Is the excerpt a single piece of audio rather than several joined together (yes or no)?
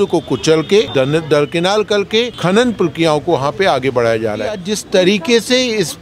no